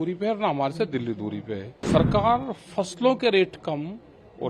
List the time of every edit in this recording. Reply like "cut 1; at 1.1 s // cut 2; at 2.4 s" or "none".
cut 1; at 1.7 s